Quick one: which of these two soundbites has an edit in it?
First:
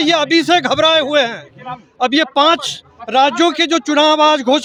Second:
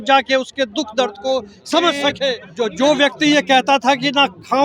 second; 1 cut; at 2.4 s

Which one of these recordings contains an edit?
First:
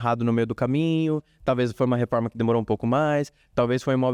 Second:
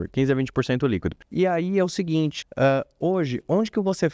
second; 2 cuts; at 1.2 s, 2.4 s

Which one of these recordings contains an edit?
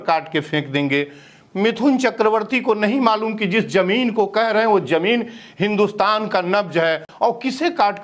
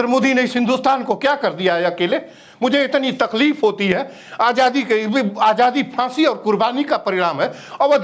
first; 1 cut; at 7.1 s

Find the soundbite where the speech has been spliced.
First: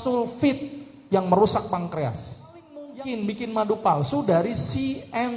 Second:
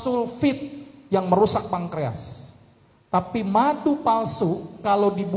first; 1 cut; at 3.0 s

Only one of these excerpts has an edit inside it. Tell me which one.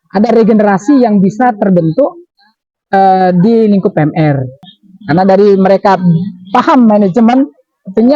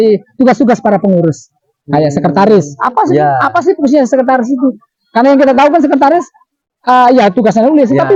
first; 1 cut; at 4.6 s

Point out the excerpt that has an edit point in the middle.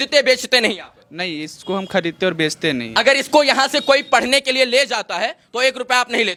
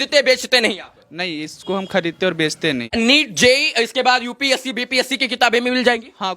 second; 1 cut; at 2.9 s

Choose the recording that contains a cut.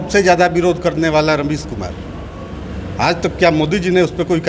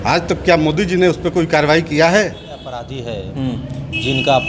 second; 1 cut; at 2.8 s

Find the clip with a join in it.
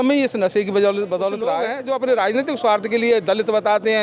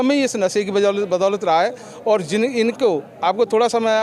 first; 1 cut; at 1.5 s

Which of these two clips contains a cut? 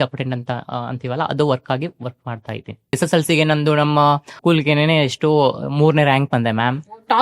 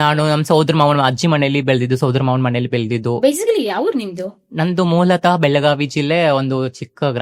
first; 2 cuts; at 3.0 s, 4.3 s

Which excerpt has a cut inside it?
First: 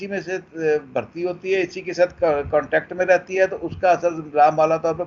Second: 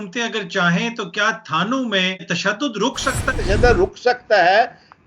second; 2 cuts; at 2.2 s, 3.3 s

